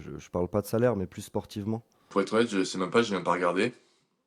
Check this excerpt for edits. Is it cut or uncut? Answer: cut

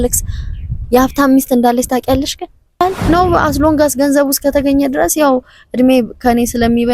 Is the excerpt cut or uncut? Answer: cut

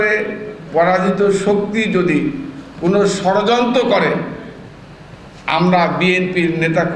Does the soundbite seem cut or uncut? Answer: uncut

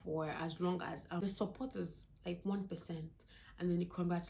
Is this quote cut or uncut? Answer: cut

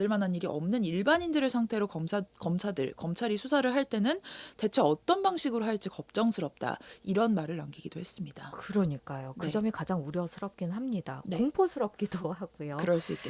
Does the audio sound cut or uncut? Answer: uncut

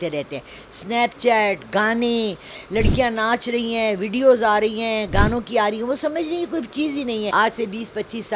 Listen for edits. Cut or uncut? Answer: cut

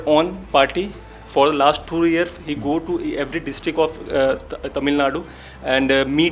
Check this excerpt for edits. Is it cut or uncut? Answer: uncut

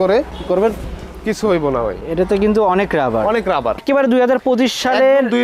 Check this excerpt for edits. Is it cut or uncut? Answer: cut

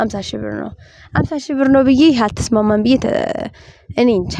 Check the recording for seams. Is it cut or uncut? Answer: uncut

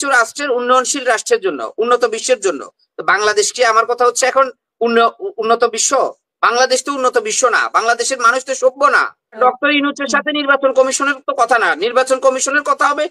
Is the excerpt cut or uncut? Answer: cut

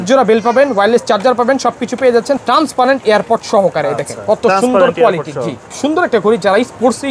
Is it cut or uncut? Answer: cut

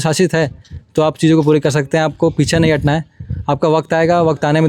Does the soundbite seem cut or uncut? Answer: uncut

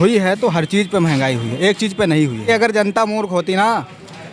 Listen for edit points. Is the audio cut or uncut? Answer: cut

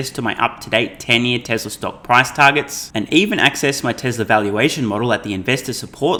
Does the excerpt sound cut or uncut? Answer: uncut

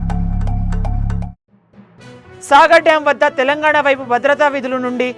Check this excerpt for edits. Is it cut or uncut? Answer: uncut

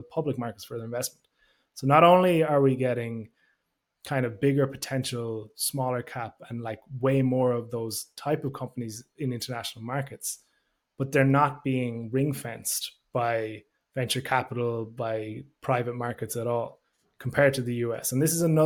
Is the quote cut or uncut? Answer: uncut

